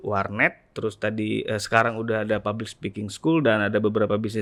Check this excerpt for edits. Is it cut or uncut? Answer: uncut